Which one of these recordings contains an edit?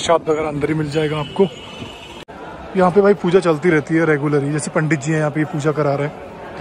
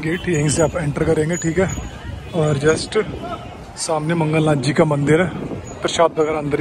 first; 1 cut; at 2.0 s

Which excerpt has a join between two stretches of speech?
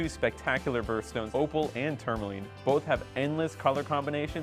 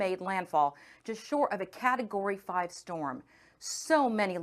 first; 1 cut; at 1.3 s

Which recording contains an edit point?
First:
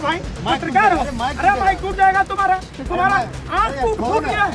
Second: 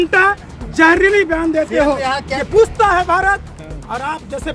second; 1 cut; at 2.2 s

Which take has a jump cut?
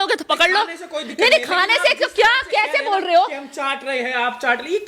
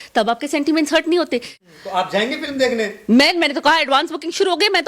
second; 1 cut; at 1.5 s

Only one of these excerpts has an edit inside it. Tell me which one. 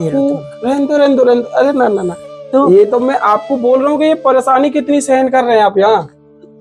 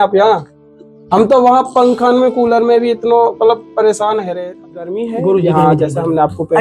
second; 1 cut; at 4.5 s

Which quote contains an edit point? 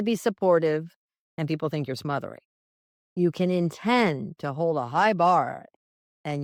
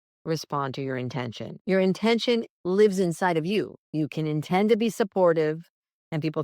second; 3 cuts; at 1.5 s, 2.5 s, 3.8 s

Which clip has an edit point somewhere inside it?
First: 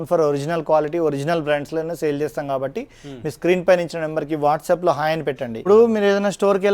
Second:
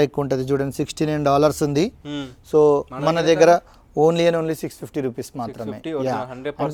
first; 1 cut; at 5.6 s

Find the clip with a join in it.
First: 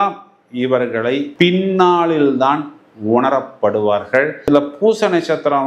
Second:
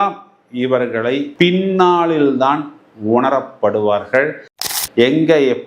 second; 1 cut; at 4.5 s

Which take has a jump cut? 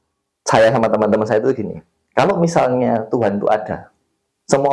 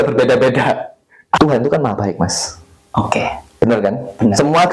second; 1 cut; at 1.4 s

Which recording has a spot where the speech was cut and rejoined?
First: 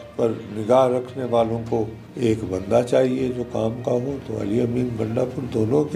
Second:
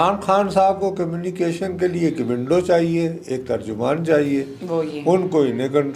first; 1 cut; at 2.0 s

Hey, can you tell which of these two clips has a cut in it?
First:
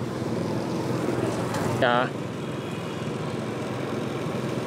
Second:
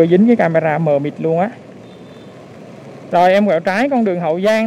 first; 1 cut; at 1.8 s

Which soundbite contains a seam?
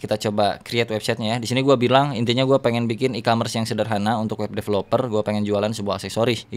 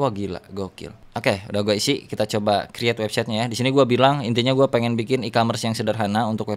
second; 1 cut; at 1.0 s

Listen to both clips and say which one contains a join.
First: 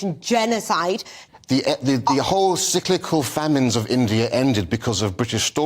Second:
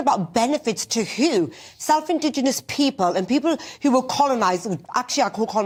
first; 1 cut; at 1.2 s

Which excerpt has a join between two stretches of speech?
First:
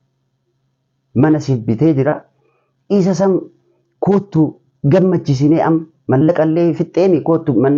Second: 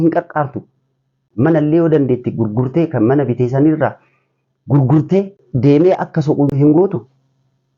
second; 3 cuts; at 1.2 s, 5.4 s, 6.5 s

